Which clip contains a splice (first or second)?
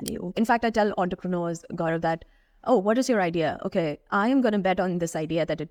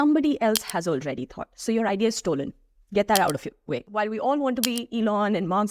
second